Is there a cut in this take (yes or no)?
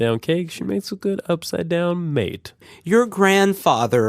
yes